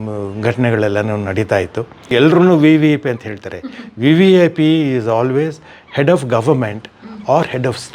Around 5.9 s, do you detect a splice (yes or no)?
no